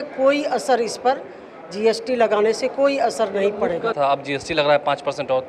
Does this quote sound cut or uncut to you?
cut